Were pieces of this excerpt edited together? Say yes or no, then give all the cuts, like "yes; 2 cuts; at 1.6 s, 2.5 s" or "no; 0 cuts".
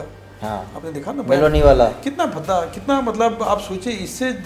no; 0 cuts